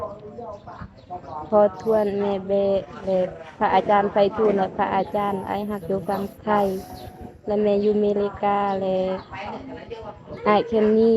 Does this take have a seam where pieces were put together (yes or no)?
no